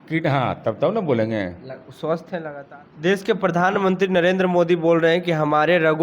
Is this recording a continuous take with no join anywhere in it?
no; 1 cut; at 2.6 s

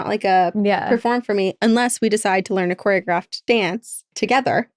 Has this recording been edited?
yes; 1 cut; at 3.6 s

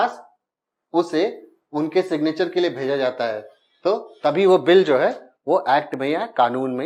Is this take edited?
no; 0 cuts

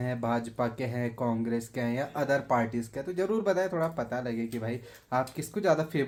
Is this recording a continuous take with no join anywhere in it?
yes; 0 cuts

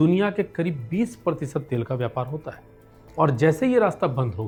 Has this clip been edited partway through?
no; 0 cuts

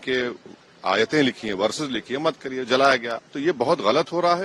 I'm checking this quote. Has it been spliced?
yes; 1 cut; at 3.1 s

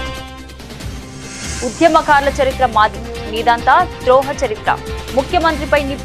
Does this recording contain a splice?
yes; 1 cut; at 1.6 s

